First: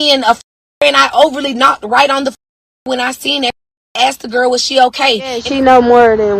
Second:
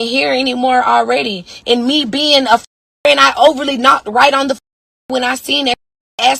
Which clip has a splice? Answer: first; 1 cut; at 5.4 s

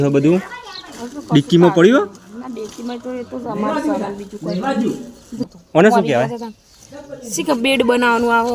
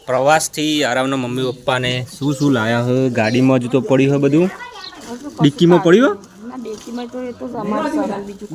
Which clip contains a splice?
first; 1 cut; at 5.5 s

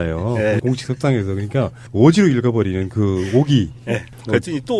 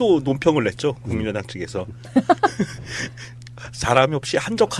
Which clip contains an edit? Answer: second; 1 cut; at 2.5 s

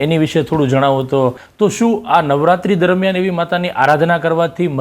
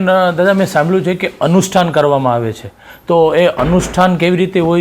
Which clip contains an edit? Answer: first; 1 cut; at 1.4 s

